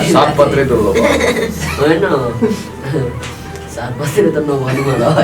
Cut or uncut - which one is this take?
uncut